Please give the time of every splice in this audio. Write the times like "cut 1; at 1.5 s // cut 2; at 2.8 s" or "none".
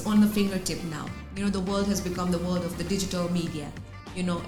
none